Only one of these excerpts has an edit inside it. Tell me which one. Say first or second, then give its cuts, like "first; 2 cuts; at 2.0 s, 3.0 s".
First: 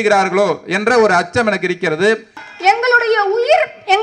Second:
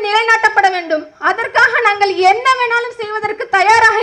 first; 1 cut; at 2.5 s